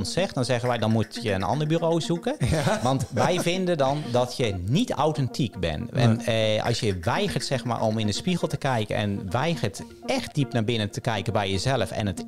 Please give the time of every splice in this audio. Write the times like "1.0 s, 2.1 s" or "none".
none

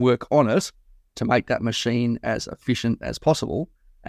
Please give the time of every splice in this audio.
none

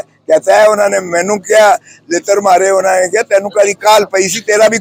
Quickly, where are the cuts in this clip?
none

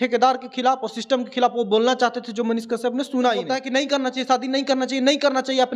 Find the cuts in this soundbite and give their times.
3.6 s

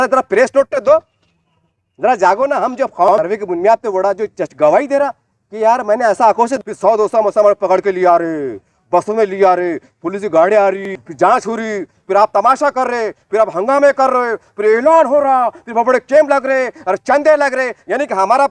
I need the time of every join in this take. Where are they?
3.1 s, 6.6 s, 11.0 s

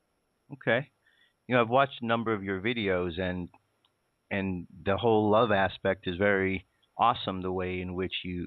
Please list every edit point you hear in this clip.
2.8 s

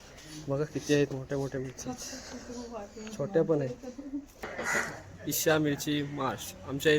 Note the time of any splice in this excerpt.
4.5 s

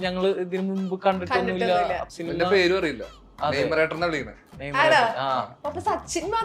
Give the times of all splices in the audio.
2.1 s, 5.5 s

